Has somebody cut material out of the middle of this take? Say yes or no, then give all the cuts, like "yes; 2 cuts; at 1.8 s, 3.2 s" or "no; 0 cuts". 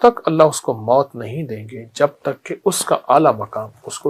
no; 0 cuts